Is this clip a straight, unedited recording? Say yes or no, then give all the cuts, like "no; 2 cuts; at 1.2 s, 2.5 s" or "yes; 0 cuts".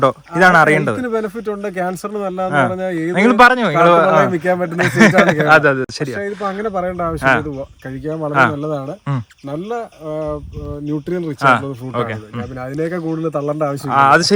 yes; 0 cuts